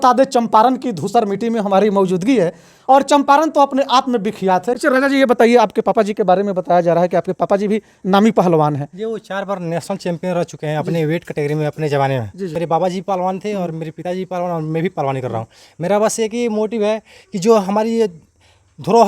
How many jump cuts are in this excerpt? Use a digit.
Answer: 2